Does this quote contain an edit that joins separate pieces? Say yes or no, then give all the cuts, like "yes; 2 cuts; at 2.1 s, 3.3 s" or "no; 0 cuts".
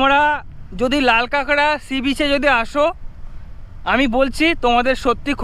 no; 0 cuts